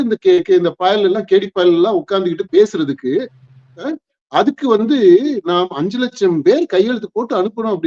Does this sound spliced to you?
no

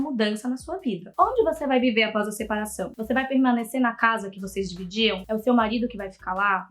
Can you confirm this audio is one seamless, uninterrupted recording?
no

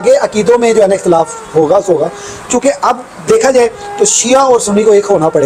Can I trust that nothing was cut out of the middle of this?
yes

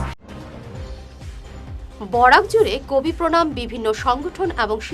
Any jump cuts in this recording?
yes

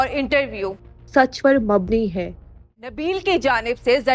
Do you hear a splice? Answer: yes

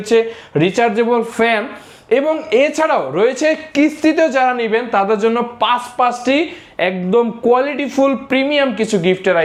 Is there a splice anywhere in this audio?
no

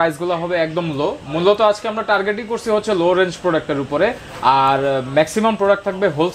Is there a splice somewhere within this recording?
no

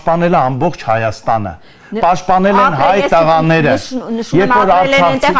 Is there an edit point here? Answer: no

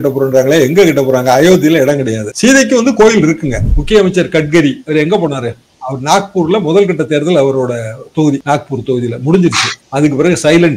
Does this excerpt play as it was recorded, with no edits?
no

